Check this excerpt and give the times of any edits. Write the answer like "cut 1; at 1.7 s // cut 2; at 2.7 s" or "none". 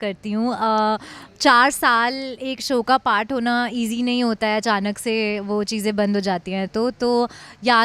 none